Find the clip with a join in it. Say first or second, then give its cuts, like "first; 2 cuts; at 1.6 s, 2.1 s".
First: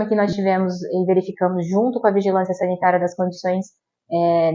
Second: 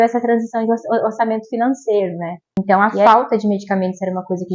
second; 1 cut; at 2.6 s